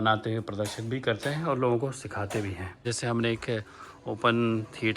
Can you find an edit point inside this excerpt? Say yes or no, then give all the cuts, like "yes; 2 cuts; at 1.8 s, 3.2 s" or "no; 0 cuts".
yes; 1 cut; at 2.8 s